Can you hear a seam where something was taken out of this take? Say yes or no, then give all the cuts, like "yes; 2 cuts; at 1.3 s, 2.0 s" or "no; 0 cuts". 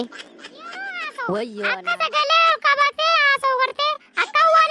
yes; 1 cut; at 1.8 s